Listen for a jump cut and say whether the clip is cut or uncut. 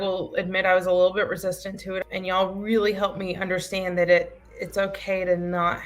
cut